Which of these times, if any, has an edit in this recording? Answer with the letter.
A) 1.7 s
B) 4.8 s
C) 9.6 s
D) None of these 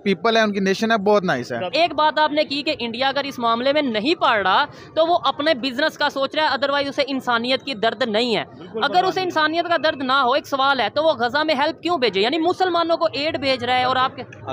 A